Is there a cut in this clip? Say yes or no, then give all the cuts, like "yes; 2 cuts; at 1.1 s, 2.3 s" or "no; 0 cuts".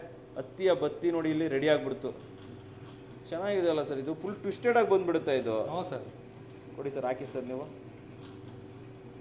no; 0 cuts